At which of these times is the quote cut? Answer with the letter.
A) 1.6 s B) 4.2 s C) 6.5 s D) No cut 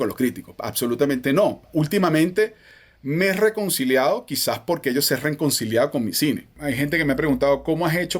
C